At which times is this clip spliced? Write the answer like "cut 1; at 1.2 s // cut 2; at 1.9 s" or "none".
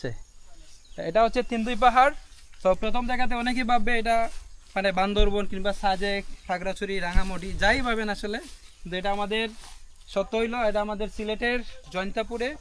none